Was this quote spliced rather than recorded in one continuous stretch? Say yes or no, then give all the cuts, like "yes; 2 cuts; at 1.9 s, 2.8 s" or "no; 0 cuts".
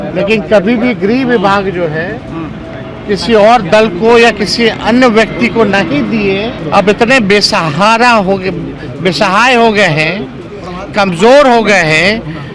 yes; 1 cut; at 6.6 s